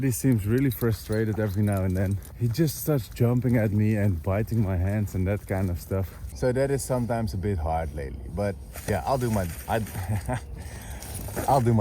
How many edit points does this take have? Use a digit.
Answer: 2